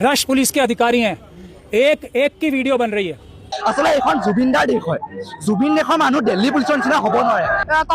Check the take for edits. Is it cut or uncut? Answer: cut